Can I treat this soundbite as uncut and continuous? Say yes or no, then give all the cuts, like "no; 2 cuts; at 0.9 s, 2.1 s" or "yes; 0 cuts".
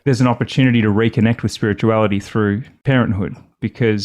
no; 1 cut; at 2.7 s